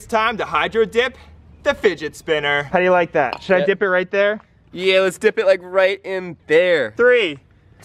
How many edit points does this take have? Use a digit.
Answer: 2